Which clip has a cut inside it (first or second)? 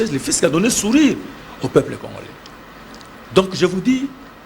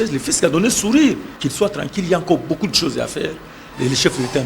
second